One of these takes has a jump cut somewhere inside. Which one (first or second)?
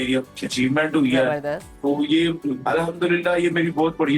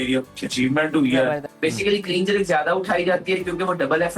second